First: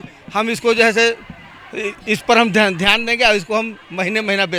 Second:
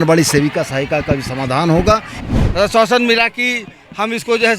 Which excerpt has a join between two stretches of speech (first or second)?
second